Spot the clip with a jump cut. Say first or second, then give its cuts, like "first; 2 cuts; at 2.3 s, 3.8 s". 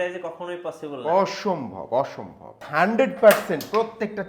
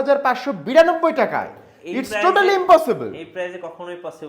first; 1 cut; at 2.6 s